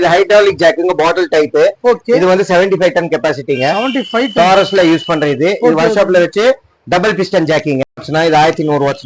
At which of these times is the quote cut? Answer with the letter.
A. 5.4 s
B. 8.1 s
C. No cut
B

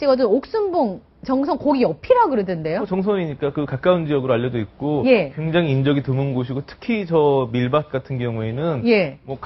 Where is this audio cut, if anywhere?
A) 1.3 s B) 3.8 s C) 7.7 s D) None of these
D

